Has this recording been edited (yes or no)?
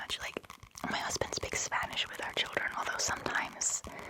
no